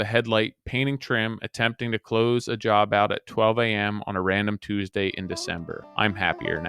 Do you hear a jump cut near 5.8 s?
yes; 1 cut; at 5.8 s

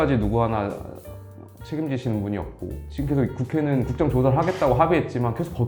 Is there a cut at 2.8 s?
yes; 1 cut; at 2.8 s

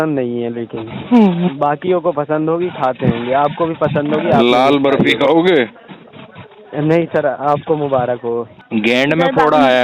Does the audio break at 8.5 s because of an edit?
yes; 1 cut; at 8.5 s

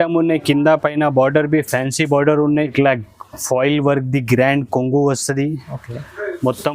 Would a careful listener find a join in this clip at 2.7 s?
yes; 1 cut; at 2.7 s

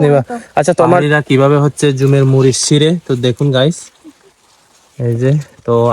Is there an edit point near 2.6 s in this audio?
no; 1 cut; at 1.0 s

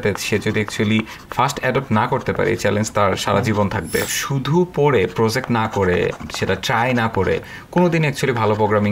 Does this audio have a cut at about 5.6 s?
no; 1 cut; at 4.1 s

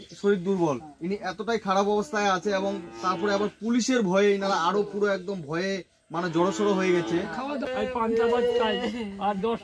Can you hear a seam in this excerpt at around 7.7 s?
yes; 1 cut; at 7.7 s

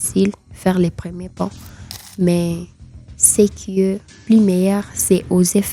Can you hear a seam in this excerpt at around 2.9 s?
no; 1 cut; at 4.1 s

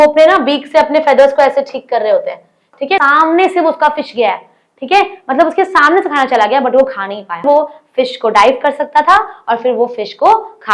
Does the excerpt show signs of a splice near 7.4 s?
yes; 2 cuts; at 3.0 s, 7.4 s

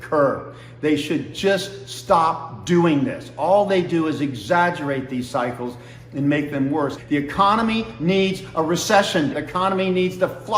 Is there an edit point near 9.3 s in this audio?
yes; 2 cuts; at 7.0 s, 9.3 s

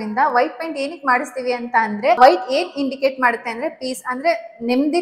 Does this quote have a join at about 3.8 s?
no; 1 cut; at 2.2 s

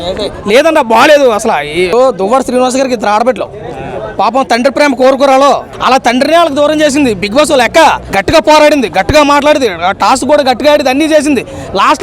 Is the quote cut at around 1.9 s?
yes; 3 cuts; at 1.9 s, 5.7 s, 8.1 s

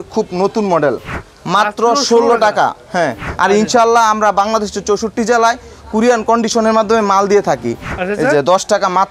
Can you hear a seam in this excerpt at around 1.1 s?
yes; 3 cuts; at 1.1 s, 3.2 s, 7.9 s

